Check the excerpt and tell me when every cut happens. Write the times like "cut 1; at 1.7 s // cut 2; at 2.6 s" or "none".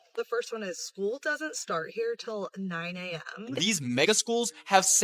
cut 1; at 3.5 s